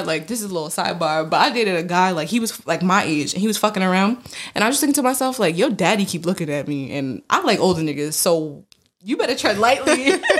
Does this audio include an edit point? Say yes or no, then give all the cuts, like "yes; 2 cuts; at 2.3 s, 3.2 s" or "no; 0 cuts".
no; 0 cuts